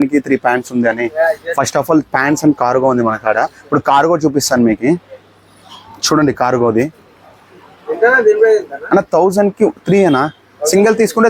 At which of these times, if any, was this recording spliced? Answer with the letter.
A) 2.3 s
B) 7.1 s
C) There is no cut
C